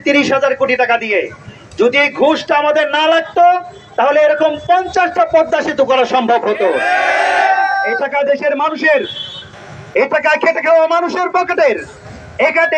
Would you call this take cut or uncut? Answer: uncut